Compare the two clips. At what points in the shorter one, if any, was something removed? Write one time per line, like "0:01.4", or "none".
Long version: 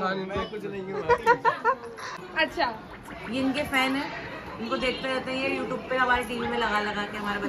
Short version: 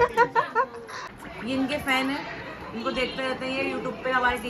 0:01.1